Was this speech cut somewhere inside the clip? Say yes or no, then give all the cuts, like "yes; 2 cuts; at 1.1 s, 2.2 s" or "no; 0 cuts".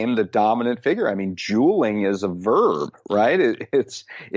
no; 0 cuts